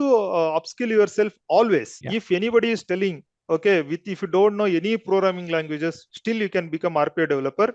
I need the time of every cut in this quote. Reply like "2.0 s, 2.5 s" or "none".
2.0 s